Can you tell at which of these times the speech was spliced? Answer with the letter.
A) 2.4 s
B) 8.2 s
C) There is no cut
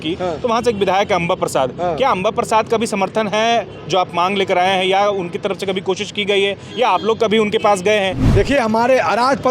B